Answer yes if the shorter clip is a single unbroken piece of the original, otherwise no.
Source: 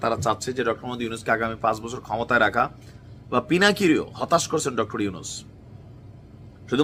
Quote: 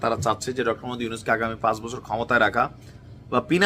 yes